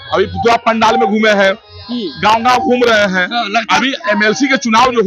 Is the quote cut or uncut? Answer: uncut